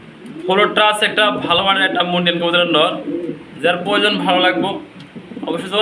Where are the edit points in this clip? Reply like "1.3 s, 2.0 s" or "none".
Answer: none